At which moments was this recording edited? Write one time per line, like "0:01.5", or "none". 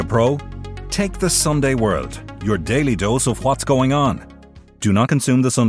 none